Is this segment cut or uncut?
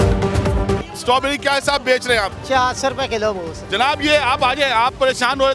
cut